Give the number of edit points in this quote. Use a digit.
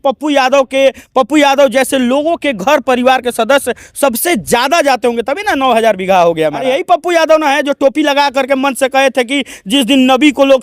1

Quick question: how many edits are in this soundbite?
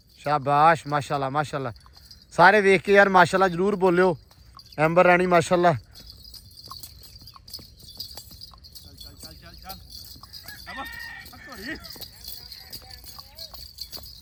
0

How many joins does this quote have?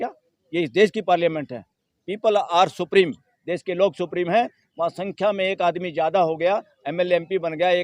0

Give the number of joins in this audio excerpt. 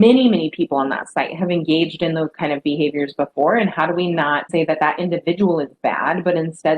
1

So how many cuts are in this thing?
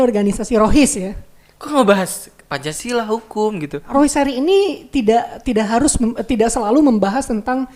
1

